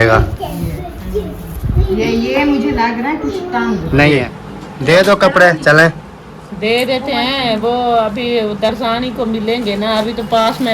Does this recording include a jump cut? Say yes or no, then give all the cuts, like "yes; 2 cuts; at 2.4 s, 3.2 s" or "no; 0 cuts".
yes; 1 cut; at 4.4 s